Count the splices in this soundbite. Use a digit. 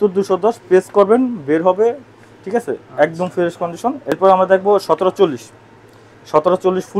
1